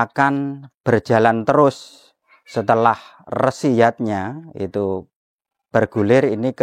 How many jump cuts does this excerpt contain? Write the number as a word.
zero